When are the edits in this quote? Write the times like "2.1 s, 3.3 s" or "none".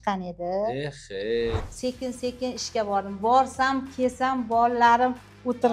1.5 s